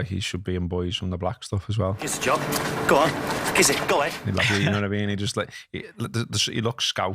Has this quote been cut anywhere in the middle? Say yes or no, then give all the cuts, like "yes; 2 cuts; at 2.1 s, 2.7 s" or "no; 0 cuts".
yes; 2 cuts; at 2.1 s, 4.2 s